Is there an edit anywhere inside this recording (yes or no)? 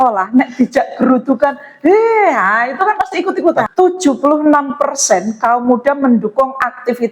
yes